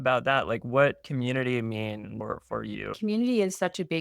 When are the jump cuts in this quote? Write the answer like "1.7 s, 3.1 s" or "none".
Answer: 2.9 s